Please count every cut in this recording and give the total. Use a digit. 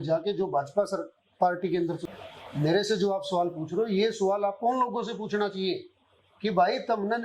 1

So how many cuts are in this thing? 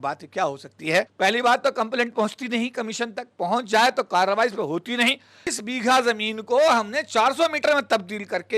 2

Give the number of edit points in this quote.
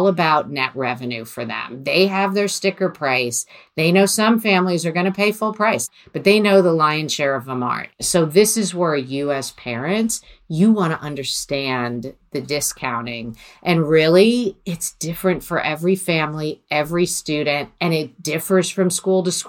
2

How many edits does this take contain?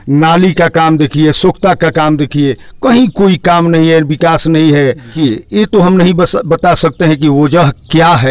1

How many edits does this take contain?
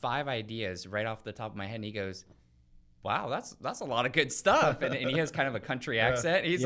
0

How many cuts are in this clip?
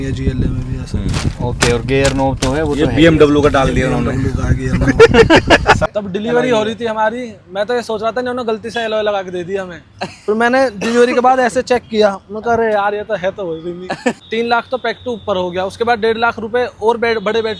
2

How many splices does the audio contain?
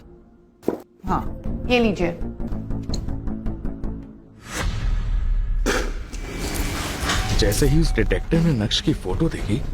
2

